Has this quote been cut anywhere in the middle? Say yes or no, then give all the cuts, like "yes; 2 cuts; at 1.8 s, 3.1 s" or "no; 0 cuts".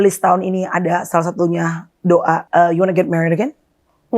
yes; 1 cut; at 2.4 s